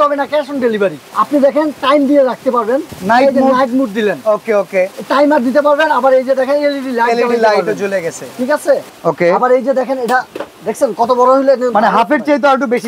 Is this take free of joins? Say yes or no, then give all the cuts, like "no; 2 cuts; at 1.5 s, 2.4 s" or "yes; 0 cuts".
no; 3 cuts; at 1.1 s, 2.9 s, 8.9 s